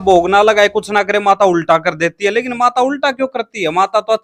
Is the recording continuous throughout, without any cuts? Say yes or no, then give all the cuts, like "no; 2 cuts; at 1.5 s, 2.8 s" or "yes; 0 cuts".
yes; 0 cuts